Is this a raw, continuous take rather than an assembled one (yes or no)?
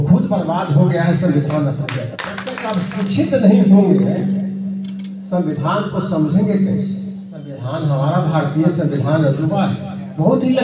no